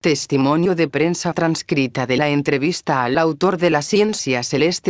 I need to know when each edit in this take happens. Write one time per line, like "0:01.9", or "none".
none